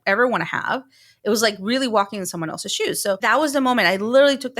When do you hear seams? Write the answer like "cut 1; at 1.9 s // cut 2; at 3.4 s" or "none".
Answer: cut 1; at 3.2 s

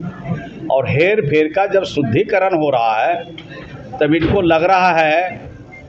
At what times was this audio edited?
none

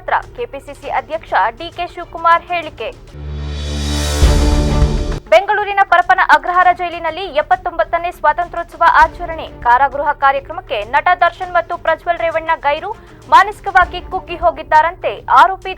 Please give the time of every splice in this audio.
none

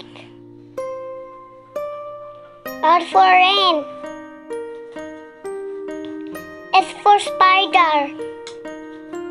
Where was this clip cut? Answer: cut 1; at 4.0 s // cut 2; at 6.4 s // cut 3; at 8.1 s

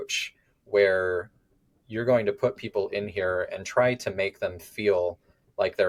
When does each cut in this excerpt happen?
none

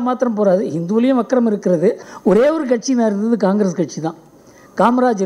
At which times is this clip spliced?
cut 1; at 2.1 s

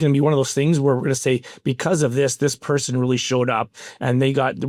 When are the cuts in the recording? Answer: none

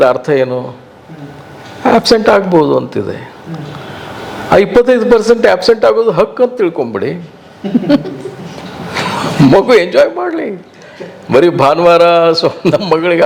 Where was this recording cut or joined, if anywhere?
none

